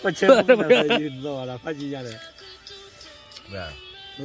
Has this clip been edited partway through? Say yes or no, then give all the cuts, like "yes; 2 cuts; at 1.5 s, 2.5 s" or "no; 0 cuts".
no; 0 cuts